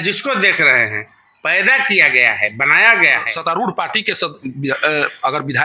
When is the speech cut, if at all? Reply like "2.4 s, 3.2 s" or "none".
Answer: 3.3 s